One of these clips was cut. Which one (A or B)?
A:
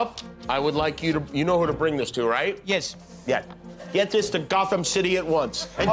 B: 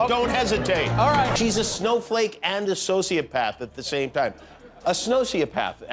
B